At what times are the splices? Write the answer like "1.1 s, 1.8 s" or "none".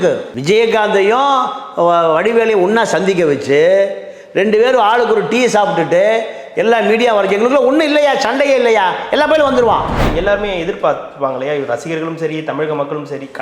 10.0 s